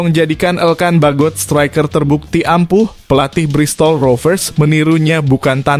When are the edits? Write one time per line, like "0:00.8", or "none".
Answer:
none